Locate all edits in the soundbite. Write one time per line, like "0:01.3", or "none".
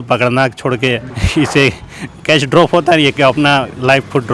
0:01.1